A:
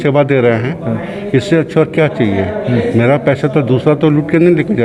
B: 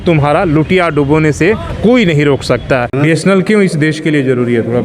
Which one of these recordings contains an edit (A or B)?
B